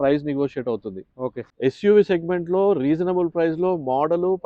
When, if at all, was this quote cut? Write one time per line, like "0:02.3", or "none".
0:01.5